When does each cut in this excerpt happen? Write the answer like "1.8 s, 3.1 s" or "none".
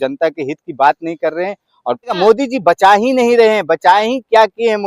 2.2 s